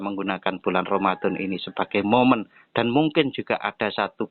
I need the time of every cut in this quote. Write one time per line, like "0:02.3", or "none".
none